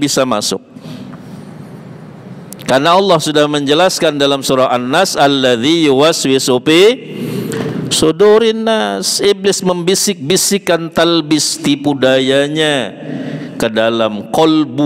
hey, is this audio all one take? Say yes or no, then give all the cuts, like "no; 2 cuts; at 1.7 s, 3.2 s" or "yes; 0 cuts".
yes; 0 cuts